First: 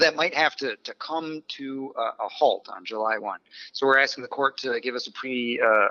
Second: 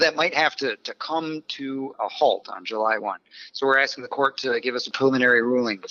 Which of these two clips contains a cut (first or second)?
second